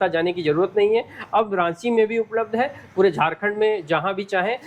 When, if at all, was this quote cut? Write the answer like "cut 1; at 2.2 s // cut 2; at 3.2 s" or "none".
none